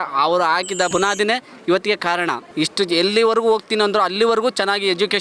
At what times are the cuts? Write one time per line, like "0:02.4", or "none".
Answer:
0:00.9
0:02.4